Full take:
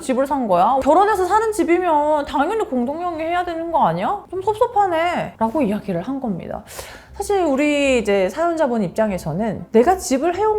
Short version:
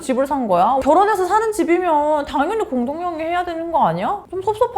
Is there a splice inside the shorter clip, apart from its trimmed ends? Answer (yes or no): no